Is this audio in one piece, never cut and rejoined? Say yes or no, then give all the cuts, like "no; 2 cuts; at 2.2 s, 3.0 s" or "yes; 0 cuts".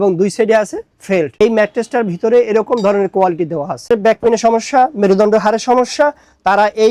no; 2 cuts; at 1.3 s, 3.9 s